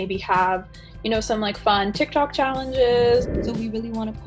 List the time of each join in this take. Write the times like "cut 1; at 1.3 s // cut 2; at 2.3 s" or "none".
cut 1; at 3.3 s